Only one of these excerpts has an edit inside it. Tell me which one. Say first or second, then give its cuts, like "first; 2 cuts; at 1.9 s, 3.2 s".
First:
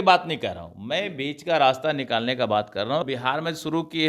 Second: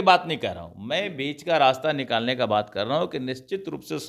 first; 1 cut; at 3.0 s